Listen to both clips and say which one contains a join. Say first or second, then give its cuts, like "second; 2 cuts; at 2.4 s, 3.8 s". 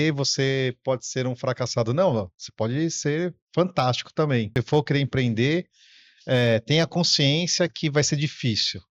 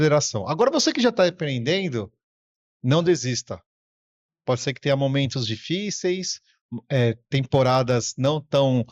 first; 1 cut; at 4.5 s